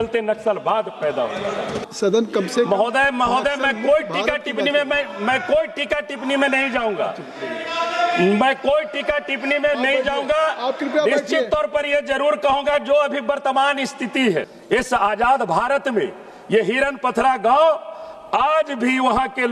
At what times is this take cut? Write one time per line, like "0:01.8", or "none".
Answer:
0:01.9
0:14.6